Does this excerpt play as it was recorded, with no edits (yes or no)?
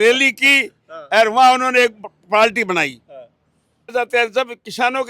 no